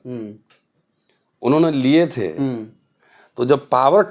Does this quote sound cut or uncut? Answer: uncut